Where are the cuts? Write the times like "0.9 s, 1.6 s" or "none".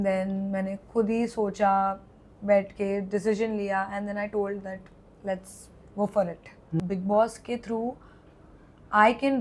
6.8 s